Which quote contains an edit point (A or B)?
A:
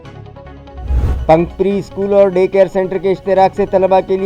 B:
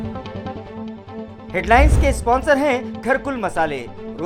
A